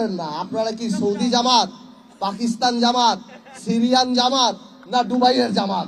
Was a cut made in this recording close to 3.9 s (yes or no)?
no